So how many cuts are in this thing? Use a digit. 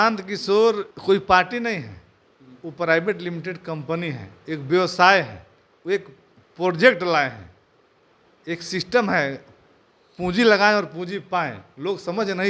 1